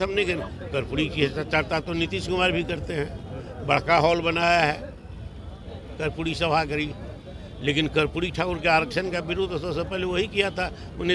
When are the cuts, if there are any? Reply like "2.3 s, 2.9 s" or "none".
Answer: none